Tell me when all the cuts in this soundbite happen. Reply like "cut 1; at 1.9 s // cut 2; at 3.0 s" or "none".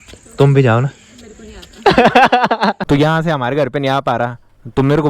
cut 1; at 2.8 s